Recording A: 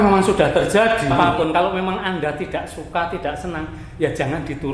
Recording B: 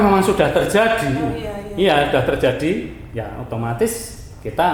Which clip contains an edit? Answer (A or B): A